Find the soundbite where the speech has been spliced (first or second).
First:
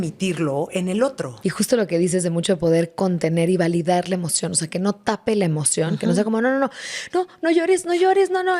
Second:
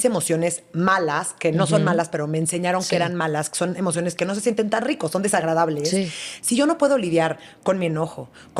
first